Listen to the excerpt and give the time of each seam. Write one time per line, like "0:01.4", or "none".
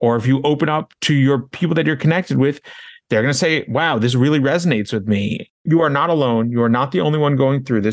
0:05.7